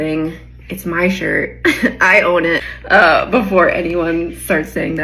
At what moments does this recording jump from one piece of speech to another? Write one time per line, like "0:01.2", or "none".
0:02.6